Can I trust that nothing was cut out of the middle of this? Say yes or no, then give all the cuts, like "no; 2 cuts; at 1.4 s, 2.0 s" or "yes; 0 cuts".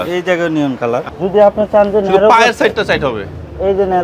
no; 1 cut; at 1.1 s